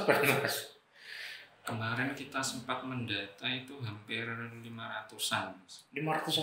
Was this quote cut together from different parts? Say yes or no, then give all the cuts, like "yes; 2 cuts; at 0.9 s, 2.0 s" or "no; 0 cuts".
no; 0 cuts